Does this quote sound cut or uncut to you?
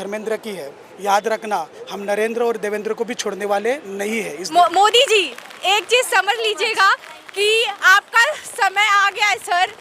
cut